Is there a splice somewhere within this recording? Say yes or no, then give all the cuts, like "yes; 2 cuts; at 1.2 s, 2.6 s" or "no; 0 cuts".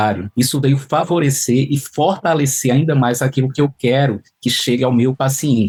no; 0 cuts